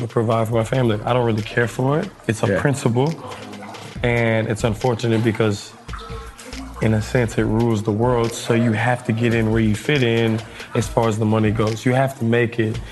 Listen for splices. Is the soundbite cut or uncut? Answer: uncut